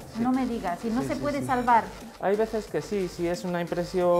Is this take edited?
no; 0 cuts

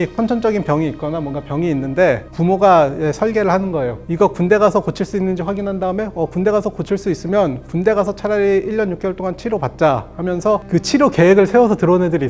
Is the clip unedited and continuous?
yes; 0 cuts

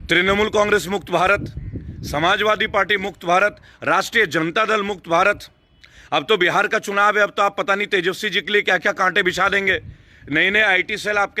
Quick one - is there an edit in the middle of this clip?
no; 0 cuts

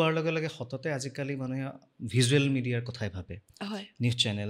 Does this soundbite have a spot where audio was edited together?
no; 0 cuts

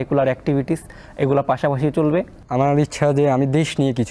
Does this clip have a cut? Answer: yes; 1 cut; at 2.4 s

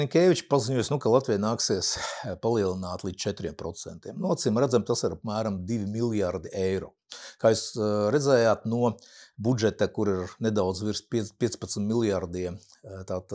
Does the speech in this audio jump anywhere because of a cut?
no; 0 cuts

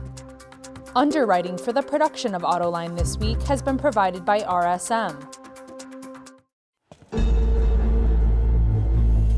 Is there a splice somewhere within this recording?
yes; 3 cuts; at 0.9 s, 5.2 s, 6.3 s

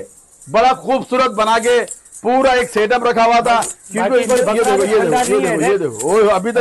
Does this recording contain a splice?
no; 0 cuts

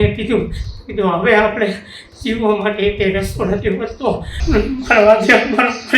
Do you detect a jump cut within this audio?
yes; 1 cut; at 4.4 s

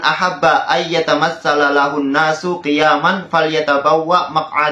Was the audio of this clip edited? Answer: no; 0 cuts

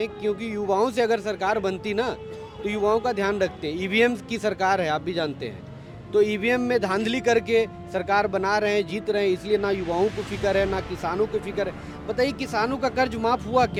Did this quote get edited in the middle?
no; 0 cuts

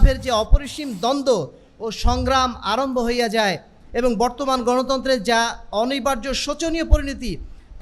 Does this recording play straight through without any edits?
yes; 0 cuts

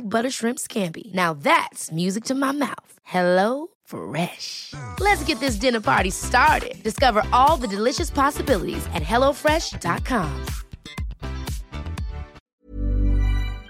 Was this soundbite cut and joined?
yes; 1 cut; at 12.4 s

